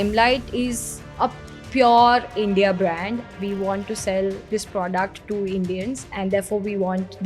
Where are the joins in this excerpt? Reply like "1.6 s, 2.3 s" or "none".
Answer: 6.1 s